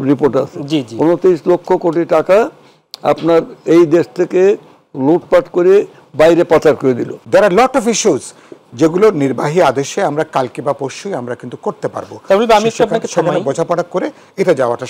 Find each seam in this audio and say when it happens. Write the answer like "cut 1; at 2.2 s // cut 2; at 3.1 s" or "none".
cut 1; at 7.1 s